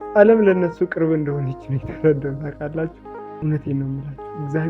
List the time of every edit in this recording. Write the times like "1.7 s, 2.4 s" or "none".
3.3 s

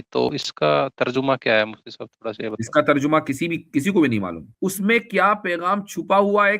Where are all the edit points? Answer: 4.4 s

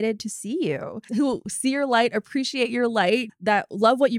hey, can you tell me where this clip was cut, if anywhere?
none

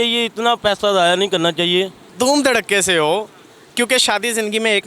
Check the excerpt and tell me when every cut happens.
2.1 s

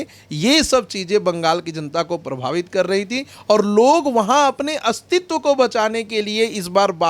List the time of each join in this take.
none

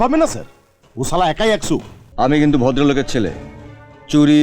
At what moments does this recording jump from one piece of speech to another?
2.0 s

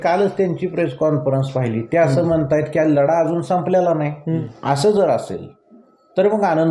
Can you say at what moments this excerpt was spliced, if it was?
4.4 s

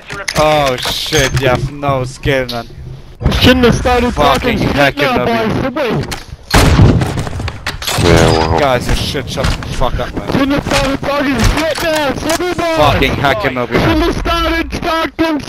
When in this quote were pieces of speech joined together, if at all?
none

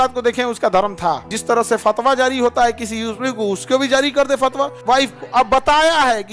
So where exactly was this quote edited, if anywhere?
1.3 s, 4.8 s

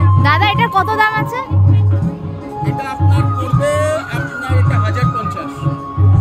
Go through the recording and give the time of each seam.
none

